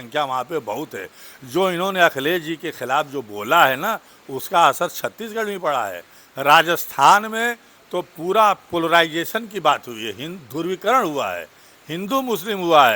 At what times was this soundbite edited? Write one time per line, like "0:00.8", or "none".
none

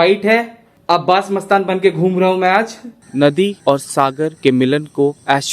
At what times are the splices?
0:03.0

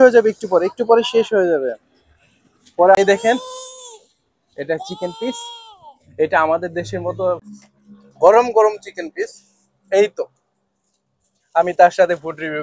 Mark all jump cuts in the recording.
0:03.0
0:07.4

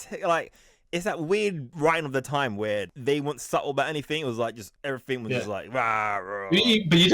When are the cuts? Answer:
0:01.7
0:02.9
0:04.7

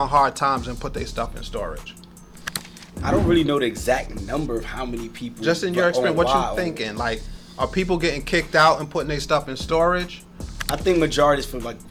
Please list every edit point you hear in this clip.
none

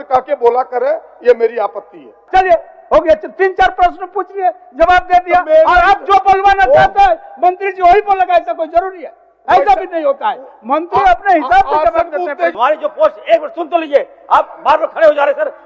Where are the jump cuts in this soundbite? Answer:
0:02.2
0:12.5

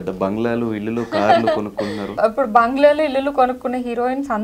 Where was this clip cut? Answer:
0:02.2

